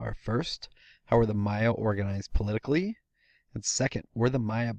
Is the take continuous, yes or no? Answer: yes